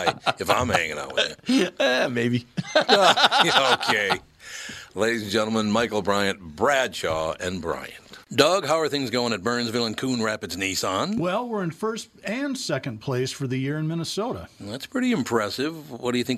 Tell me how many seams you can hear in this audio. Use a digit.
1